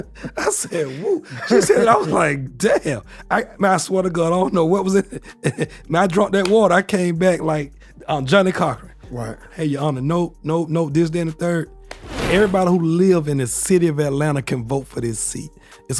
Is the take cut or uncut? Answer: cut